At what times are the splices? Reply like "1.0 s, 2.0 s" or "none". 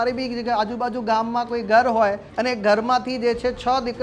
2.3 s